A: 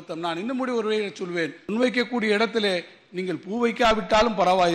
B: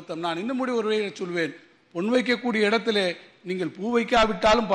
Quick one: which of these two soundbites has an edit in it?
A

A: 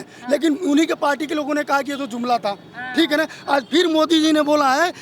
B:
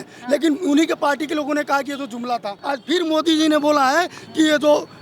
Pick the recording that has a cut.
B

